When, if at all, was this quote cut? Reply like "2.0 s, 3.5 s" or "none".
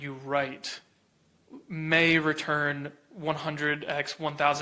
none